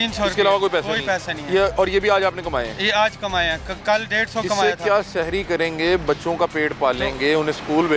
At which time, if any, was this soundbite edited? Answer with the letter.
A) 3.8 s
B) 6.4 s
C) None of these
C